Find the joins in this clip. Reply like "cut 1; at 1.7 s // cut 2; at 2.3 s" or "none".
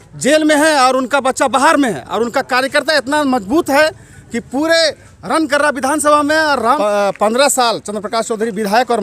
cut 1; at 6.8 s